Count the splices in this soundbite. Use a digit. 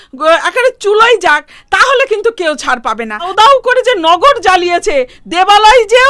1